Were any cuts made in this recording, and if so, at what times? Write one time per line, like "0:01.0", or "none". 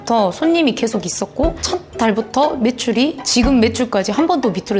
none